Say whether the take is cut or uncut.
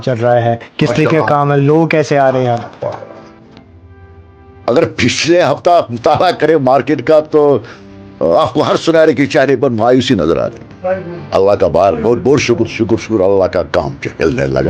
uncut